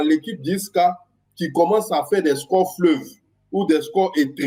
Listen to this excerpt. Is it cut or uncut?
uncut